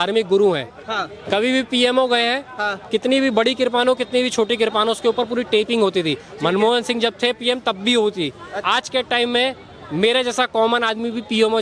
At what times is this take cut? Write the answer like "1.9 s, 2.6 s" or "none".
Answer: 8.5 s